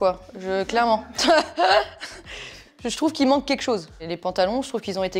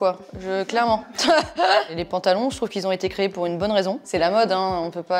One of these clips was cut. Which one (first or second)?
second